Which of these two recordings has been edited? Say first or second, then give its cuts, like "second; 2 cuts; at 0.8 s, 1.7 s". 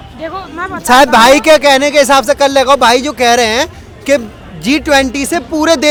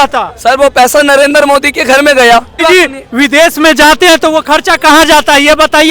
second; 1 cut; at 2.6 s